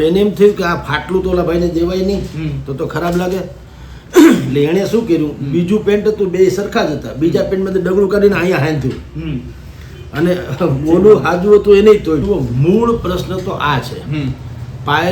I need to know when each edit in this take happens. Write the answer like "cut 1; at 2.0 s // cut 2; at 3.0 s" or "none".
cut 1; at 12.2 s